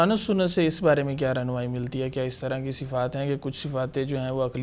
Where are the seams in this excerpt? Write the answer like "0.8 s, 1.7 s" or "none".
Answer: none